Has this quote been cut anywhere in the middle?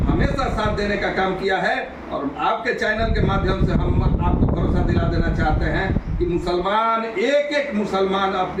no; 0 cuts

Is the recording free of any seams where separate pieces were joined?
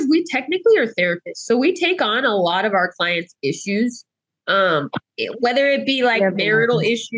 yes; 0 cuts

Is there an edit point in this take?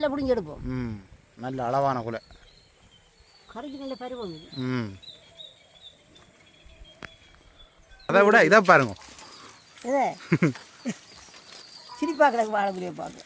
yes; 1 cut; at 8.1 s

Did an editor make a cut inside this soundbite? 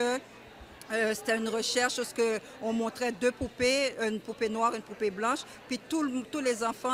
no; 0 cuts

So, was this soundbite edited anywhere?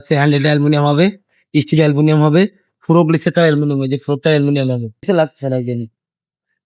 yes; 1 cut; at 5.0 s

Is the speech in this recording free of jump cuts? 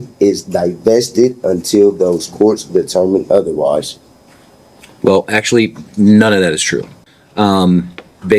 yes; 0 cuts

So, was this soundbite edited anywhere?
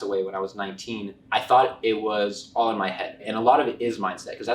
yes; 2 cuts; at 1.1 s, 3.2 s

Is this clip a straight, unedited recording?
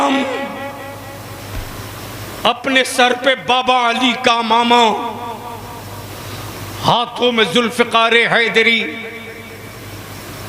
yes; 0 cuts

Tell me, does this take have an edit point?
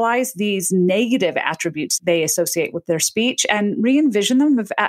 yes; 1 cut; at 1.9 s

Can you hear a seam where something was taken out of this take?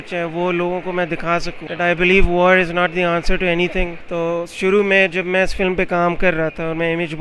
yes; 2 cuts; at 1.6 s, 4.0 s

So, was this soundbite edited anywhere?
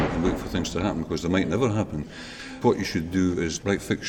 no; 0 cuts

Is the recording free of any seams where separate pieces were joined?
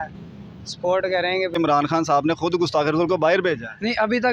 no; 1 cut; at 1.5 s

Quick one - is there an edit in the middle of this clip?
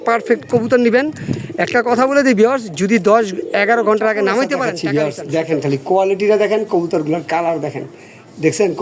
yes; 1 cut; at 4.8 s

